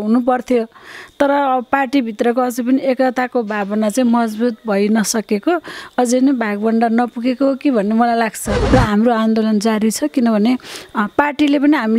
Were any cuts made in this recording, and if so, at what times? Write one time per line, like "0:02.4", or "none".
0:08.5